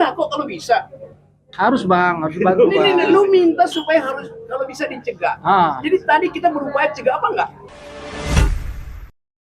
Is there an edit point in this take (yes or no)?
yes